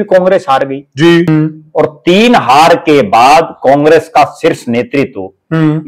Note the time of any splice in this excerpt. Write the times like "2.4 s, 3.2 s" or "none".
1.3 s